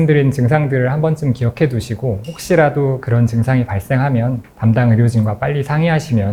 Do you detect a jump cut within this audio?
no; 0 cuts

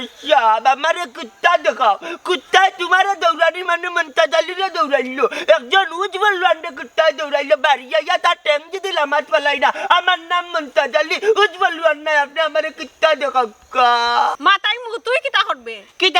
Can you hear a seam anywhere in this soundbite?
yes; 1 cut; at 14.3 s

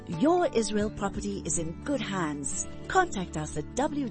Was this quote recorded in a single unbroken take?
yes; 0 cuts

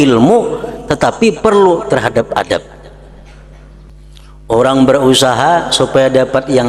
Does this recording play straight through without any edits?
no; 1 cut; at 3.9 s

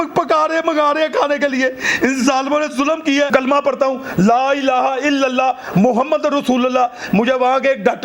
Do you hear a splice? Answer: yes; 1 cut; at 3.3 s

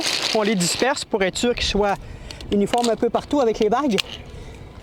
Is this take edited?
no; 0 cuts

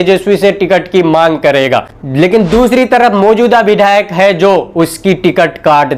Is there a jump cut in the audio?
no; 0 cuts

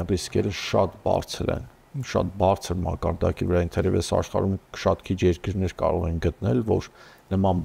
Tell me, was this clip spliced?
no; 0 cuts

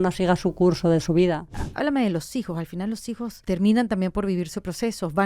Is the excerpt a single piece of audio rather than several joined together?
no; 2 cuts; at 1.6 s, 3.4 s

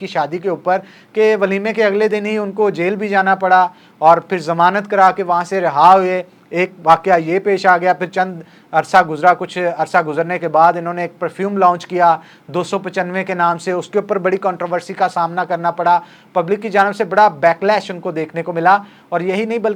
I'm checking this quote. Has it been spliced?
no; 0 cuts

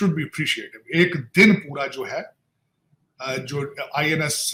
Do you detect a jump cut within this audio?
no; 0 cuts

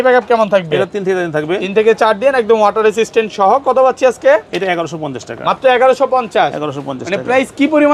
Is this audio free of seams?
yes; 0 cuts

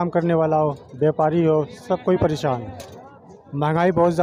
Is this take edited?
no; 0 cuts

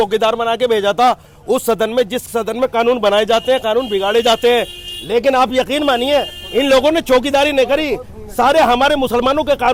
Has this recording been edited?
no; 0 cuts

